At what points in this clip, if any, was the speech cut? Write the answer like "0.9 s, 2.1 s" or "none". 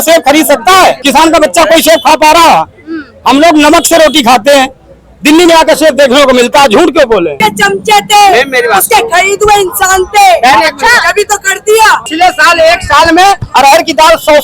1.0 s, 7.4 s, 12.0 s